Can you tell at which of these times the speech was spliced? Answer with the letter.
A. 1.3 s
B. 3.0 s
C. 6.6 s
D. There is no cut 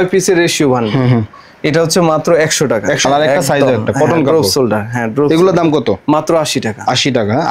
B